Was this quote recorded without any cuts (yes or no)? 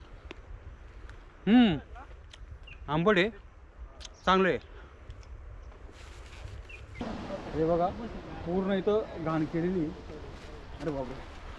no